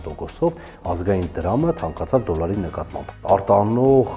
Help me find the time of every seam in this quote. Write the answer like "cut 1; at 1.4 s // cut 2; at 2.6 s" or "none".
cut 1; at 3.1 s